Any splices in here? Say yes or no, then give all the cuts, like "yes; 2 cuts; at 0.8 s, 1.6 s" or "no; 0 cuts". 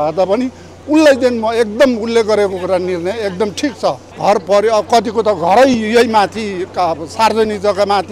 yes; 1 cut; at 4.1 s